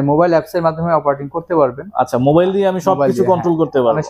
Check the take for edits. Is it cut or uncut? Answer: uncut